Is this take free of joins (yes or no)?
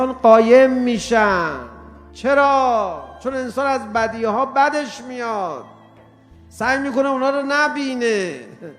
no